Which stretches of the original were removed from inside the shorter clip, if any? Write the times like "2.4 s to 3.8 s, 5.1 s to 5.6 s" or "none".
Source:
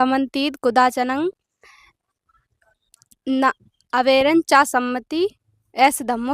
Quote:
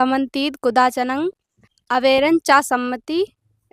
1.7 s to 3.7 s